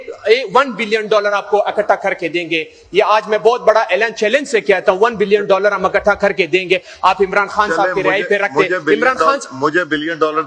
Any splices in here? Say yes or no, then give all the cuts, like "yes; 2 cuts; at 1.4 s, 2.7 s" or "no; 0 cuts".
no; 0 cuts